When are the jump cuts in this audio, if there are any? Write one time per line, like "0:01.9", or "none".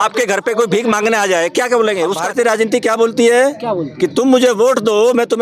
0:02.2